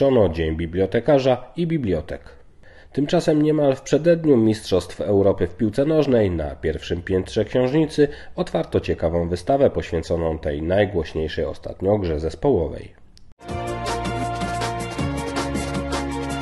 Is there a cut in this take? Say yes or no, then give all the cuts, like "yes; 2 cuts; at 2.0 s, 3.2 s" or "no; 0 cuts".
yes; 2 cuts; at 2.4 s, 13.4 s